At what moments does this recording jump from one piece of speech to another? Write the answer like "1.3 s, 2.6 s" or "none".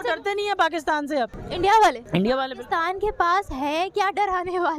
1.4 s, 2.0 s